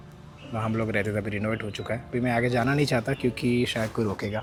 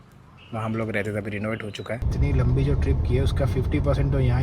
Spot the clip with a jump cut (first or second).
second